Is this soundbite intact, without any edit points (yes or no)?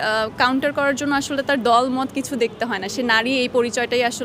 yes